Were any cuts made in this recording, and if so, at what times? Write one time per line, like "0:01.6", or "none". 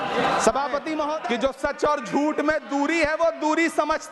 0:00.9